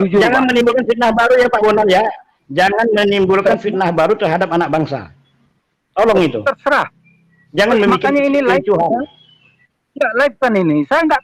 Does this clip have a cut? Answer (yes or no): no